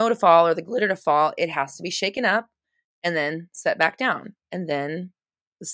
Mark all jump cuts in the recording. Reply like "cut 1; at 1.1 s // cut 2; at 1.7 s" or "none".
cut 1; at 4.4 s